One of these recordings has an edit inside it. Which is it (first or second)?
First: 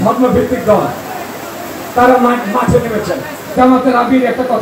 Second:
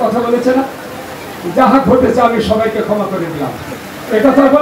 first